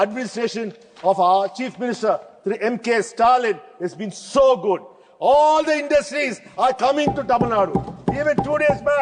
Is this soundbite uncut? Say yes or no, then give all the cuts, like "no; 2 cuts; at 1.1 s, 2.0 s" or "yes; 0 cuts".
yes; 0 cuts